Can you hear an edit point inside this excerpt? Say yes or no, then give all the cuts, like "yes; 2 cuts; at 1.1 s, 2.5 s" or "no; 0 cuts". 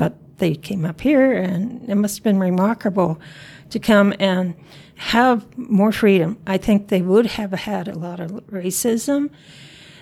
no; 0 cuts